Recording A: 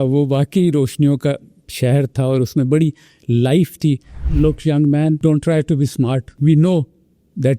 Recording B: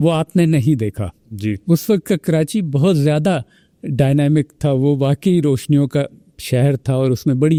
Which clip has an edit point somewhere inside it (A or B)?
A